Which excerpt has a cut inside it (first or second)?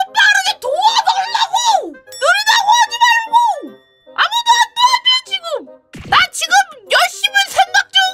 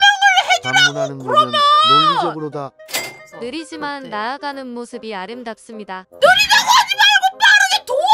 first